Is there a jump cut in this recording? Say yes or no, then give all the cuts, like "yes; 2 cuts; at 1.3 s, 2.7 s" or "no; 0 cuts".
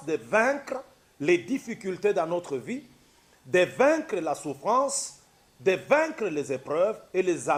no; 0 cuts